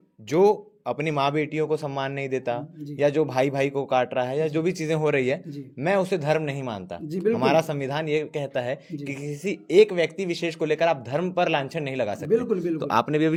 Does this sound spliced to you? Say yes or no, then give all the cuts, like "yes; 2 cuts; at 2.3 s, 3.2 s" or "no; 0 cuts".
no; 0 cuts